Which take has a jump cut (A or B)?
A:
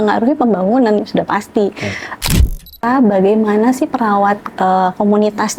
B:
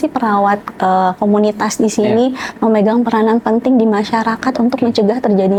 A